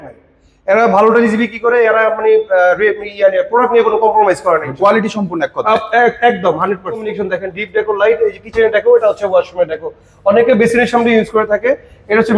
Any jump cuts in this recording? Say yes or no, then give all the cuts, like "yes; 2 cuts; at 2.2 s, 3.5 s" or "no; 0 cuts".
yes; 1 cut; at 7.1 s